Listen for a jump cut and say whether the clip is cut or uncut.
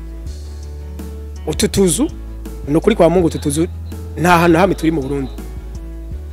cut